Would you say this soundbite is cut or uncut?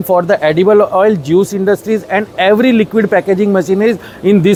uncut